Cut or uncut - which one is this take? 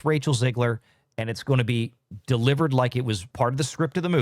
cut